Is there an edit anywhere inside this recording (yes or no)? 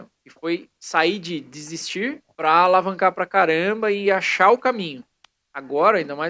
yes